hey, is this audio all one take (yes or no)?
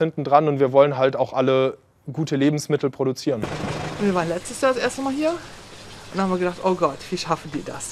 no